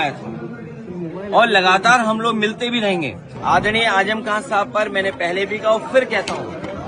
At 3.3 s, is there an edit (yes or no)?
yes